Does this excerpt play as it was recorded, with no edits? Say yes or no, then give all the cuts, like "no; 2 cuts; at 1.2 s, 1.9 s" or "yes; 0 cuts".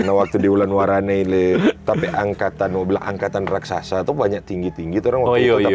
yes; 0 cuts